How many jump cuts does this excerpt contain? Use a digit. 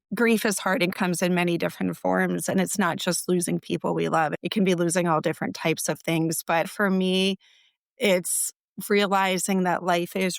3